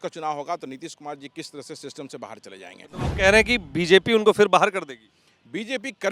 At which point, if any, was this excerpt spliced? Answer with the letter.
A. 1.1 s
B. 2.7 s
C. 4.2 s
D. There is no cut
D